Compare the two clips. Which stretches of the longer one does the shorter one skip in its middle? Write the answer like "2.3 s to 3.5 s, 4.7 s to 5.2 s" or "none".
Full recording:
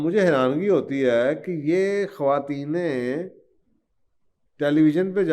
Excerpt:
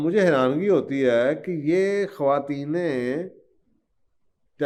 none